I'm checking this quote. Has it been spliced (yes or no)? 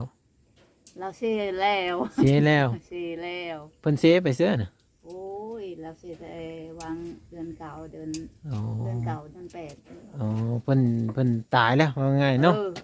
no